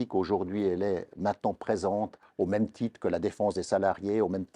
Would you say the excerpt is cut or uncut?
cut